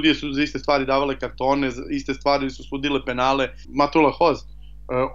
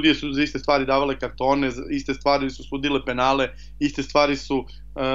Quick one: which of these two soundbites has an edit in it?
first; 1 cut; at 3.6 s

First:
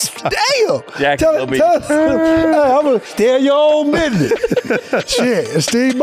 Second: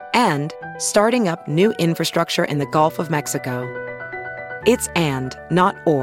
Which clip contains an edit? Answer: first; 2 cuts; at 0.9 s, 3.0 s

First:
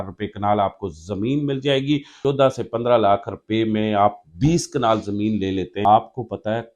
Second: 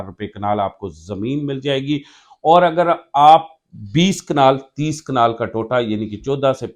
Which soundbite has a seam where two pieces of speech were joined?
first; 2 cuts; at 2.1 s, 5.8 s

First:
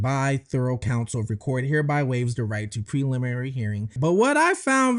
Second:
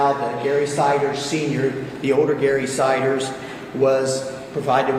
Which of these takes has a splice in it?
first; 1 cut; at 3.9 s

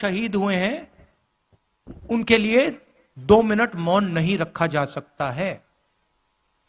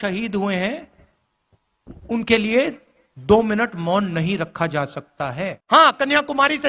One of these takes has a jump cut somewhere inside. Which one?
second; 1 cut; at 5.5 s

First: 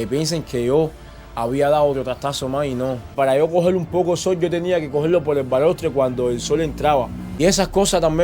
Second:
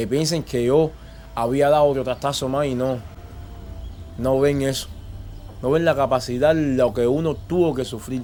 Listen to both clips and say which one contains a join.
first; 2 cuts; at 3.1 s, 7.2 s

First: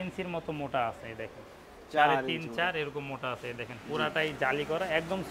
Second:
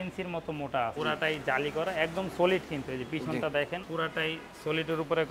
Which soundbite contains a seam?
second; 2 cuts; at 0.9 s, 3.9 s

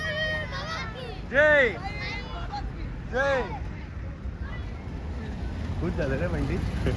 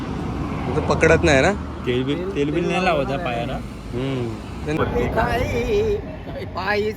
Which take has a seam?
second; 1 cut; at 4.8 s

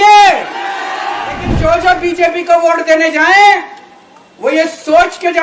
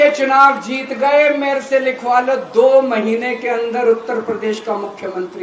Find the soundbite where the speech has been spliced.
first; 1 cut; at 1.5 s

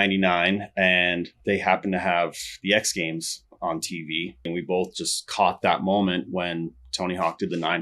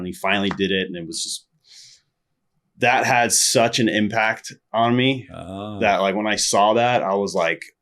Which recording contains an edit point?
first; 1 cut; at 4.5 s

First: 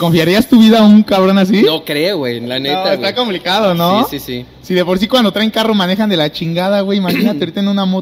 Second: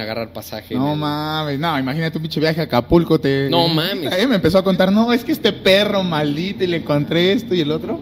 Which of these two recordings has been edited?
second; 1 cut; at 4.1 s

